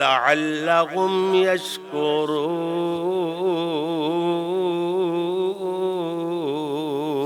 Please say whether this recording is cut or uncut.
uncut